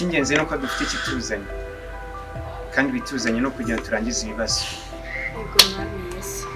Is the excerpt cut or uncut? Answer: uncut